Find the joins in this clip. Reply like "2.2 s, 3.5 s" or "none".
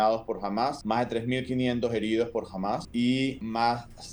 0.8 s, 3.0 s